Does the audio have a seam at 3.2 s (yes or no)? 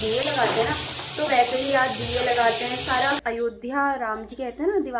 yes